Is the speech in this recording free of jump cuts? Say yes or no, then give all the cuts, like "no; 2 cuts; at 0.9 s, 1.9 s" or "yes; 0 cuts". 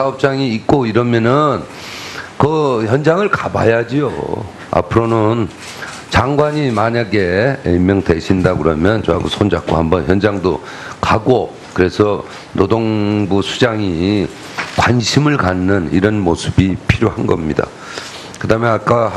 no; 1 cut; at 5.5 s